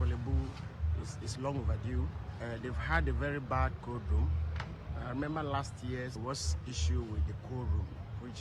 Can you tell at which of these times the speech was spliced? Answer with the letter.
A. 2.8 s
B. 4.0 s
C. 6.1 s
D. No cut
C